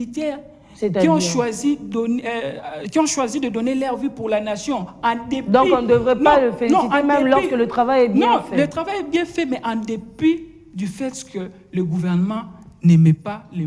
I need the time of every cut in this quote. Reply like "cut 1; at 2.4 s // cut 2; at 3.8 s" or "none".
none